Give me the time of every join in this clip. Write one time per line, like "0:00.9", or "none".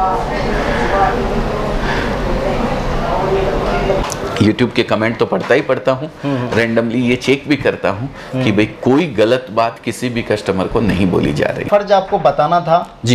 0:04.0
0:11.6